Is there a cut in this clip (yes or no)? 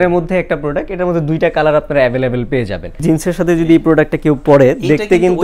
yes